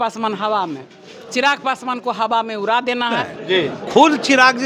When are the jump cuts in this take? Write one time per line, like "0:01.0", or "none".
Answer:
0:03.3